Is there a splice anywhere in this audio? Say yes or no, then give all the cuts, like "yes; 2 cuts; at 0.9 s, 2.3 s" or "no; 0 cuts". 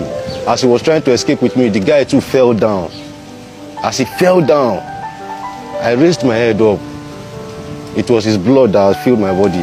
no; 0 cuts